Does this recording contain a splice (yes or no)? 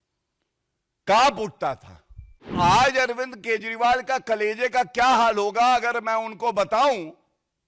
yes